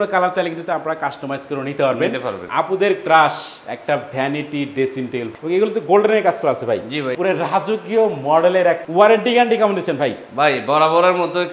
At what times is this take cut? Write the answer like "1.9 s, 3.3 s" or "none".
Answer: 2.4 s, 5.3 s, 7.1 s, 8.8 s